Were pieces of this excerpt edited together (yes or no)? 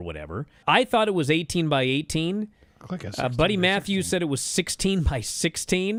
no